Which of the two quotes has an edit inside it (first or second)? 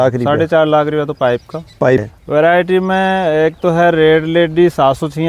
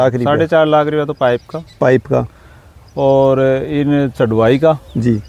first